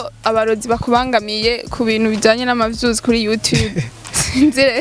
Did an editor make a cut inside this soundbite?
no; 0 cuts

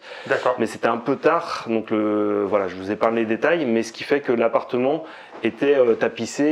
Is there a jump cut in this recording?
no; 0 cuts

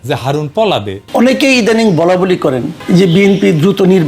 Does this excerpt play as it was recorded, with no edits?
no; 2 cuts; at 1.0 s, 2.7 s

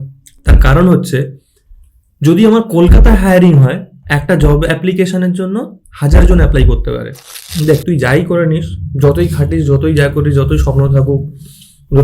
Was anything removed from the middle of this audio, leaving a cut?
yes; 1 cut; at 7.5 s

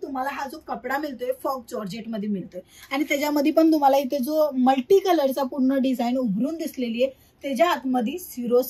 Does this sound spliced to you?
no; 0 cuts

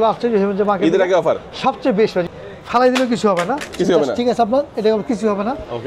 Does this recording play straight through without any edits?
no; 1 cut; at 2.3 s

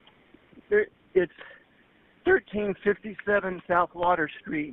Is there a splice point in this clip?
no; 0 cuts

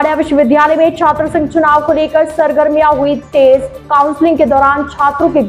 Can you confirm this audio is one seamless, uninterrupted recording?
yes; 0 cuts

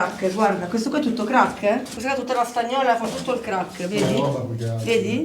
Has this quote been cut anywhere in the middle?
yes; 1 cut; at 1.9 s

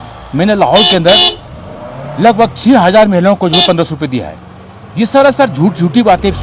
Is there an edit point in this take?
no; 0 cuts

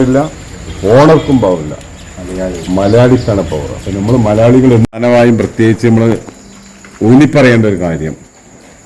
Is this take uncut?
no; 1 cut; at 4.8 s

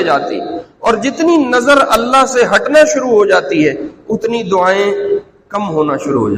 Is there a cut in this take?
no; 0 cuts

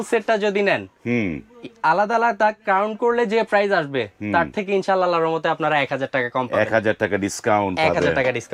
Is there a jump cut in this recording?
no; 0 cuts

